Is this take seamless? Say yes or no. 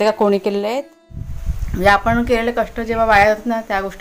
no